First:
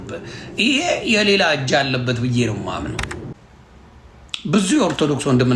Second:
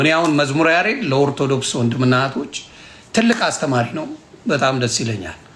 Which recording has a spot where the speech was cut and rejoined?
first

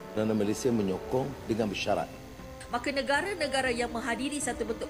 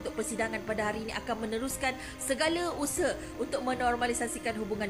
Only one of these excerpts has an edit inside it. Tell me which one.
first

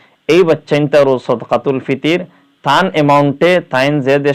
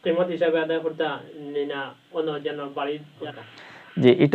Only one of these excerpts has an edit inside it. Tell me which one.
second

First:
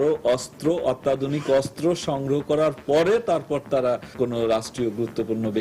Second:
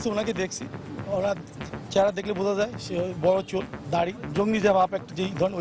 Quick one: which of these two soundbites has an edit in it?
first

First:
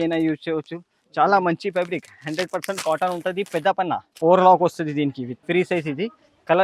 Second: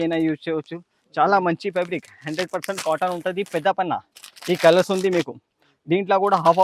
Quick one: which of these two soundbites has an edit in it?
first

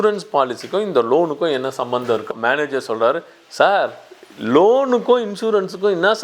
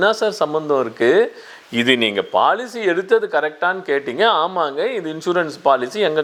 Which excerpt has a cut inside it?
first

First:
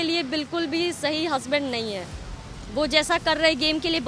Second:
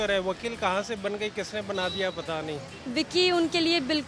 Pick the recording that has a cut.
second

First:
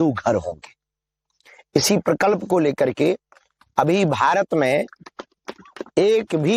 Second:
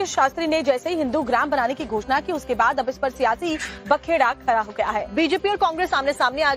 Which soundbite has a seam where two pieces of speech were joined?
second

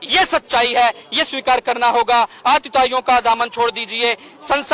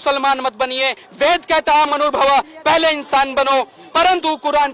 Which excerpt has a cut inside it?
second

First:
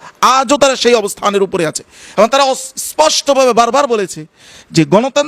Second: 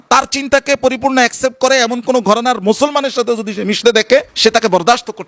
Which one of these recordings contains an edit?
second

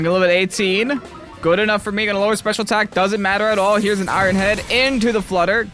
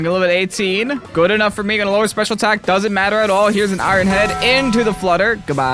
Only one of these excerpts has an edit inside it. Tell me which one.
second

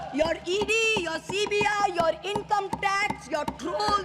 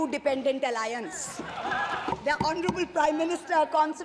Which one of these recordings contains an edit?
second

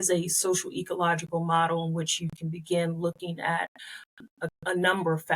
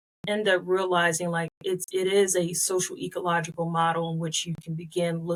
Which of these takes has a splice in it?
first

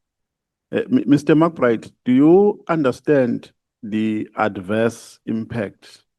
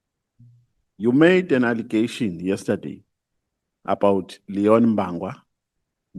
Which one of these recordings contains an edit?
first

